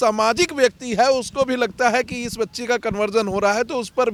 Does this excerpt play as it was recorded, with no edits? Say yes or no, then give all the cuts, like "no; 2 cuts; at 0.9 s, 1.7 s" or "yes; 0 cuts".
yes; 0 cuts